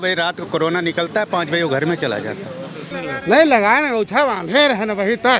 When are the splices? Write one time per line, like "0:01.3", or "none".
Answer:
0:02.9